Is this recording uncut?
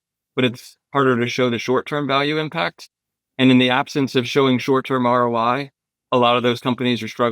yes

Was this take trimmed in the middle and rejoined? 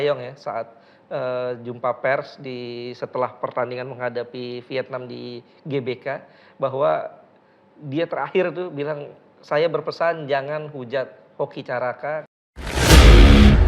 yes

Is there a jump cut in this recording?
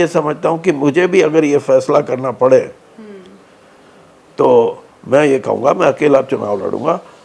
no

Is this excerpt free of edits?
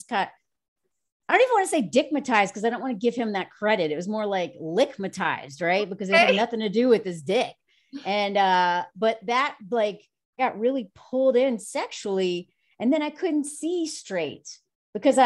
no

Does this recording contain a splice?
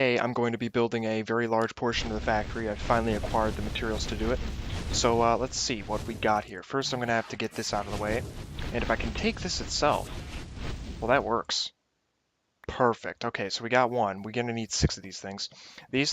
yes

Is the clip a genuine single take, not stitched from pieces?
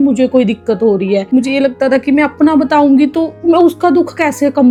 yes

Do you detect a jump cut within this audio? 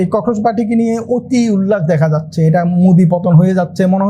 no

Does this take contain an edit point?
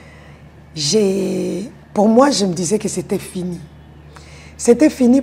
no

